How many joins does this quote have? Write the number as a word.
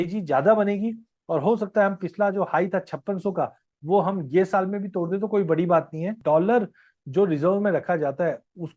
one